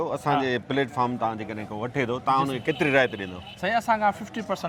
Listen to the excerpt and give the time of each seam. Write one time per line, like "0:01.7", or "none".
none